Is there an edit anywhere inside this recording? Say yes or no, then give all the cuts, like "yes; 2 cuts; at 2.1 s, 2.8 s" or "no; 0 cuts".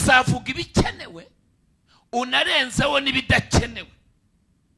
no; 0 cuts